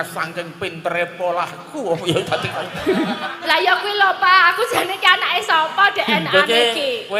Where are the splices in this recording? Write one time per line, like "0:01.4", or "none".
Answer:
0:03.3